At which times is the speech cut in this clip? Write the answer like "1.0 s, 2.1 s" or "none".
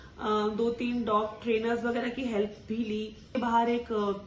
3.3 s